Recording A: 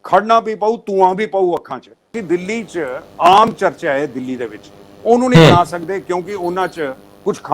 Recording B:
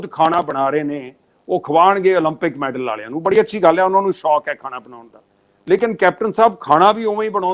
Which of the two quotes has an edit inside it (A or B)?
A